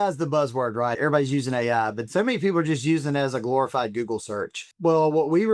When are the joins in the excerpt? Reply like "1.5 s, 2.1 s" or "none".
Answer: 1.0 s, 4.7 s